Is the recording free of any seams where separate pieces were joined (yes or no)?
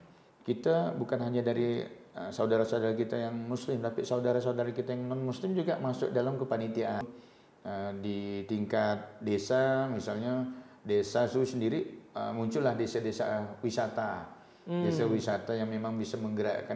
no